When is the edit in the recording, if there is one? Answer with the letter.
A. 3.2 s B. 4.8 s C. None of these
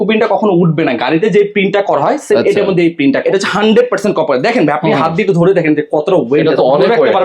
A